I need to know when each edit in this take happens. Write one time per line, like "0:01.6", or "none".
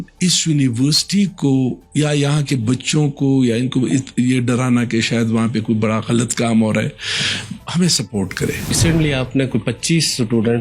0:08.7